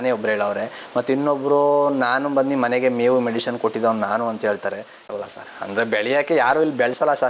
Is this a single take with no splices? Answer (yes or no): no